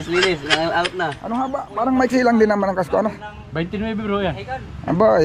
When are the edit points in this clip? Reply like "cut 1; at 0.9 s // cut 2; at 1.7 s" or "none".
cut 1; at 1.2 s